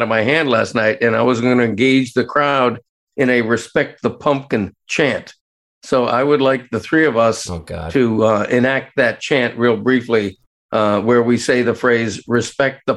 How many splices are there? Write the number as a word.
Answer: zero